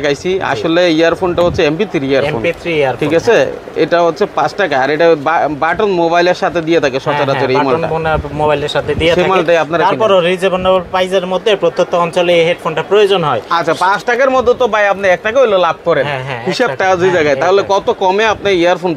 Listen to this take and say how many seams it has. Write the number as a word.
zero